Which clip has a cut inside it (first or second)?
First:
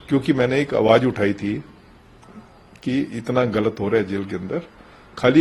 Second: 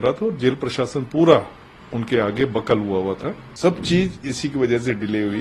second